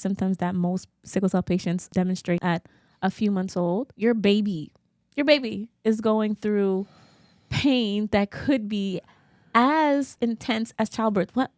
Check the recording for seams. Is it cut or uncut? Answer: cut